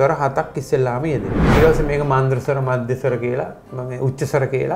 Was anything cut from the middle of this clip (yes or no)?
yes